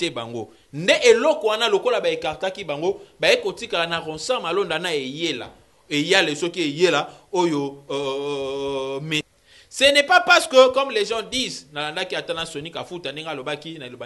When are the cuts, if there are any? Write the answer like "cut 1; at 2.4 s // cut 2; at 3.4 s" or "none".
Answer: cut 1; at 9.2 s